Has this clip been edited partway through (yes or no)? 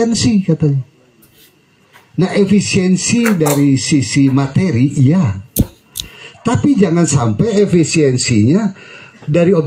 no